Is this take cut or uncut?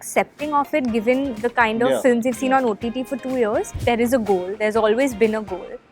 cut